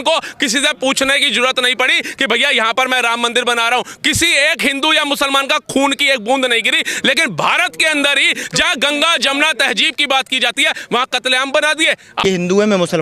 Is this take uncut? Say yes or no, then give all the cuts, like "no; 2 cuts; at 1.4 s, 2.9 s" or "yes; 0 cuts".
no; 1 cut; at 12.1 s